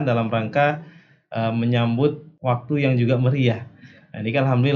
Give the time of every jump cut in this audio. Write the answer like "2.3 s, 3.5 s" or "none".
2.3 s